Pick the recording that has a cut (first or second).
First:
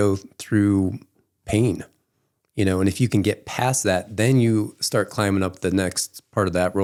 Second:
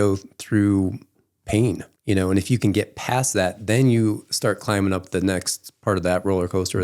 second